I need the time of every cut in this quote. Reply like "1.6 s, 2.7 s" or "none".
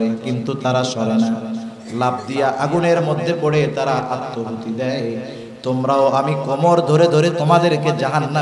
none